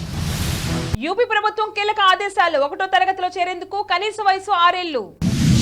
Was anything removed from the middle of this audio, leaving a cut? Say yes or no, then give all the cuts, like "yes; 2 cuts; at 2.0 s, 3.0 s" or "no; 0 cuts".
yes; 1 cut; at 0.9 s